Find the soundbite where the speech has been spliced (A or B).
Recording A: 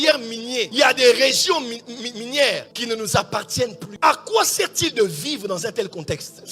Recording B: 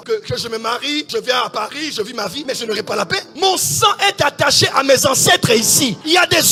A